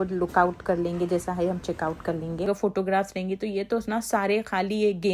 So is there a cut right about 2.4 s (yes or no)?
yes